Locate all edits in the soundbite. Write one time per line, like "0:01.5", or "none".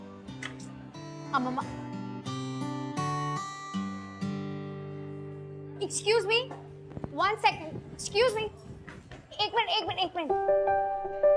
none

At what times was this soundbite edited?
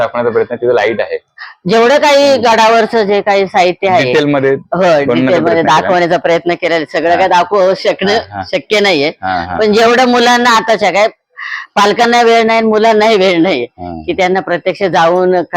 none

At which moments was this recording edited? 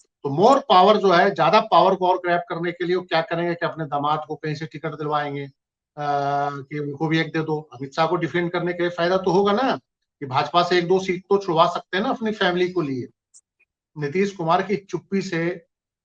0:13.7

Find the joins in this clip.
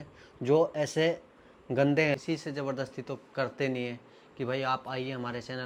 none

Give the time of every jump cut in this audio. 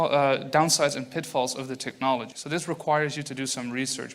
0:02.3

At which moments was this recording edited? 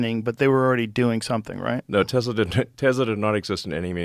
none

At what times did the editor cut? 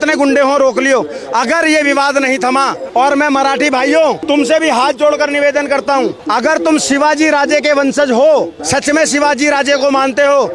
0:02.8
0:08.6

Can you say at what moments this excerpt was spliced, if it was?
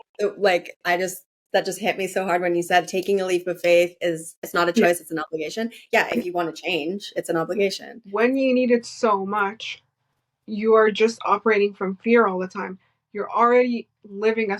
0:04.4
0:07.9

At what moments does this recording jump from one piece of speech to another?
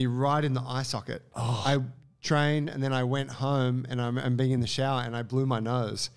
0:01.5

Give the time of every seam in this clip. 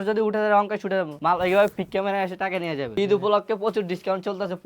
0:01.1
0:02.9

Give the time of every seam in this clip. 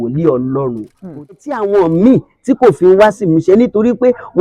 0:01.5

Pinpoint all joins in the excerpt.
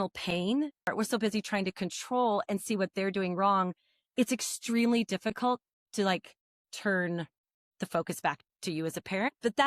0:00.9

